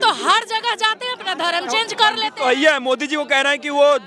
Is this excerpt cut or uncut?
uncut